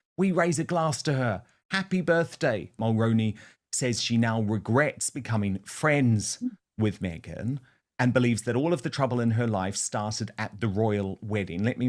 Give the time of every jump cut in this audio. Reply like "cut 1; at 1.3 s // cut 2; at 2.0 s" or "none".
cut 1; at 2.3 s